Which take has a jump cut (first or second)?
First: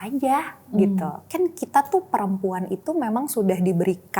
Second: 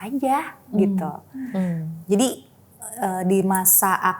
first